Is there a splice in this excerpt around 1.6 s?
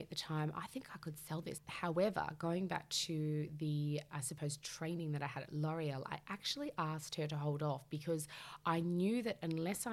yes; 1 cut; at 1.6 s

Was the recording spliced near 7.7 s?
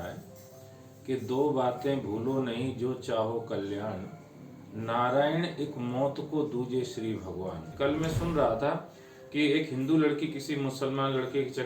yes; 1 cut; at 7.7 s

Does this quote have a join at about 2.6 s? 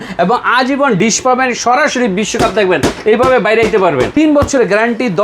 no; 2 cuts; at 1.0 s, 4.1 s

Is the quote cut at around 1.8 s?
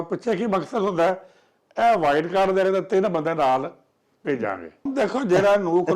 no; 1 cut; at 4.8 s

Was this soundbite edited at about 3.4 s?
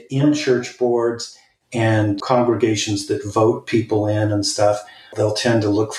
no; 1 cut; at 2.2 s

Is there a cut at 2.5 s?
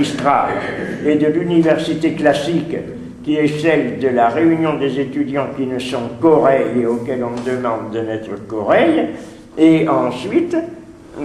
no; 1 cut; at 7.8 s

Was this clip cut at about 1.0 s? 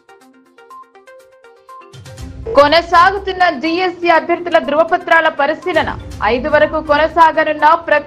yes; 2 cuts; at 1.0 s, 2.4 s

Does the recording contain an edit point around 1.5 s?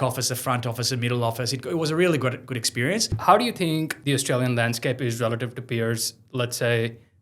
no; 2 cuts; at 3.1 s, 4.0 s

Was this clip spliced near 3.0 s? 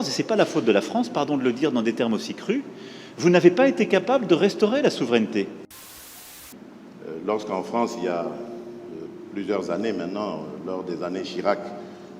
no; 1 cut; at 6.2 s

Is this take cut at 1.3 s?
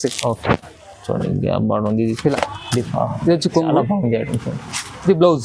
no; 1 cut; at 2.9 s

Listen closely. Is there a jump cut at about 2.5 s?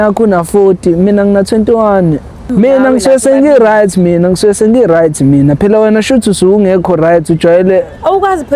yes; 1 cut; at 2.5 s

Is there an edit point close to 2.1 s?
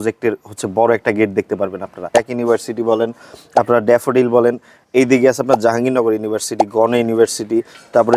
yes; 1 cut; at 2.1 s

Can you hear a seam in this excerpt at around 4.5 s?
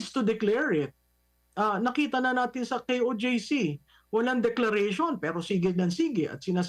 no; 0 cuts

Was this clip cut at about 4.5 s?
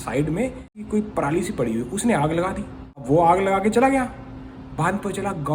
no; 2 cuts; at 0.9 s, 3.0 s

